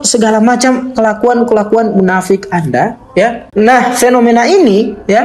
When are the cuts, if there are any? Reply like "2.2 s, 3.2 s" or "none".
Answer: 3.4 s